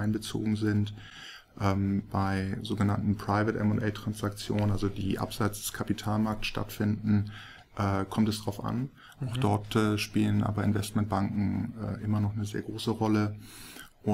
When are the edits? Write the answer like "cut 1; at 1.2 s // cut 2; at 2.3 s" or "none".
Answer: none